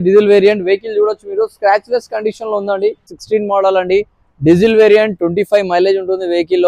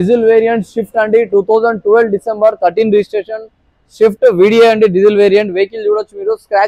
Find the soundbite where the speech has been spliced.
first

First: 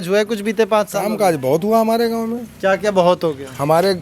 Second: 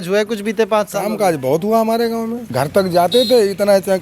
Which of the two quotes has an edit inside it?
second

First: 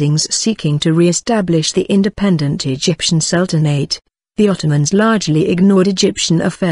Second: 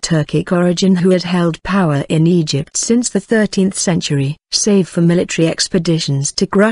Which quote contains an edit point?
second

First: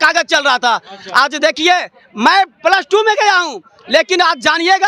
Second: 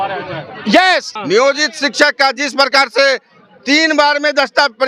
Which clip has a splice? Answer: second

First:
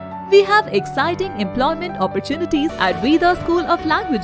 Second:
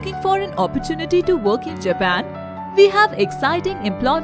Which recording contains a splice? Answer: first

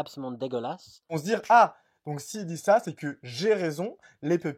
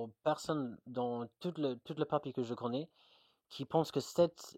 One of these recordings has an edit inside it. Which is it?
first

